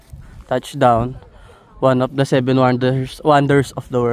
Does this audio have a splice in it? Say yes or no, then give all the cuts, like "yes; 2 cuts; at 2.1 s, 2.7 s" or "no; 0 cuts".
no; 0 cuts